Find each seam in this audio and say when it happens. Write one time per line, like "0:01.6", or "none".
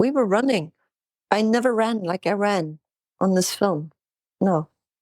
none